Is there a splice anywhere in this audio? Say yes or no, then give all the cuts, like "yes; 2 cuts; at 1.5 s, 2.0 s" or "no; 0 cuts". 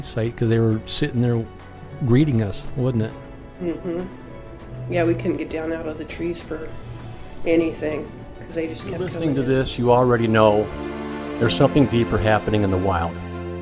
no; 0 cuts